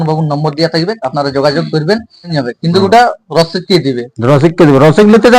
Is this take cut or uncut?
cut